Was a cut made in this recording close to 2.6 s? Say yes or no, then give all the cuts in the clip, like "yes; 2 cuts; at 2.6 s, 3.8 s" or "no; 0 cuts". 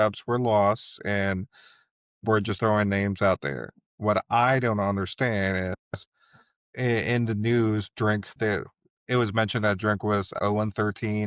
no; 3 cuts; at 6.7 s, 8.3 s, 10.3 s